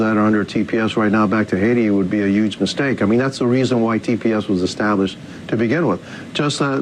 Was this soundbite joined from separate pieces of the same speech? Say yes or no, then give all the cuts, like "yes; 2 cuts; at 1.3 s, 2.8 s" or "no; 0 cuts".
yes; 1 cut; at 3.0 s